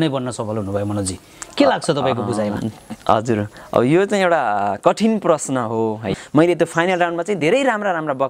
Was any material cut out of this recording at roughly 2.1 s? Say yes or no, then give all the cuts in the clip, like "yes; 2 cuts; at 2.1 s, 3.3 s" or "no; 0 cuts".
no; 1 cut; at 6.1 s